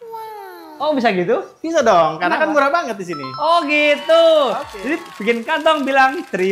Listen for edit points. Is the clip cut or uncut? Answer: uncut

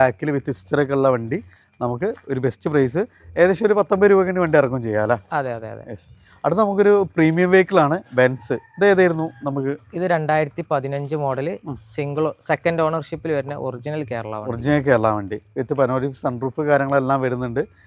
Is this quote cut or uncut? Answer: uncut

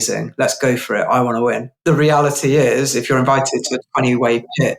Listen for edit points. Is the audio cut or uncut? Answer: cut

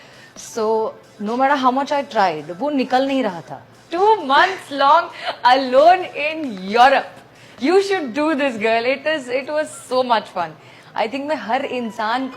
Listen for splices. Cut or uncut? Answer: cut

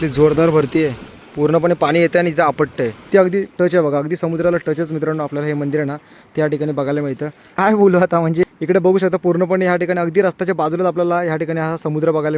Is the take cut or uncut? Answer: cut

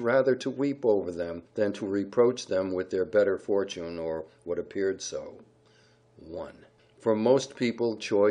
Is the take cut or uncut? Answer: uncut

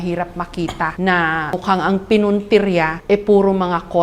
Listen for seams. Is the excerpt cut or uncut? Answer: cut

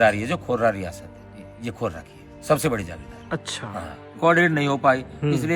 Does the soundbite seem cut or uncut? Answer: cut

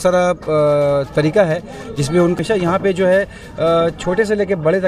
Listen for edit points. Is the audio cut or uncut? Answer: cut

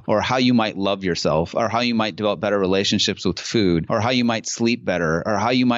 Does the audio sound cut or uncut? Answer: uncut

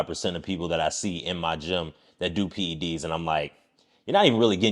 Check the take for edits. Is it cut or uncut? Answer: uncut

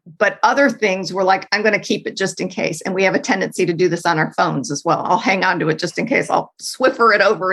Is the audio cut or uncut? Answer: cut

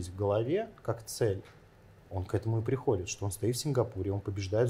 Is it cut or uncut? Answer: uncut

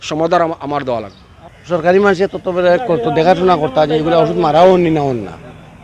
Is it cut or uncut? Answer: cut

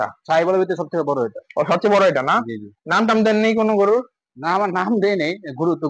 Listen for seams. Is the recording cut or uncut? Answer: uncut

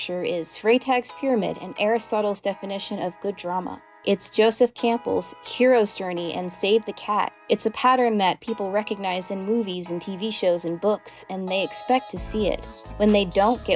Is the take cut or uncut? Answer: uncut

